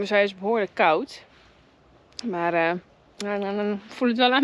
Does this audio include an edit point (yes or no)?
no